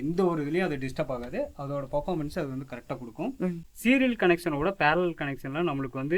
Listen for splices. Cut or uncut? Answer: cut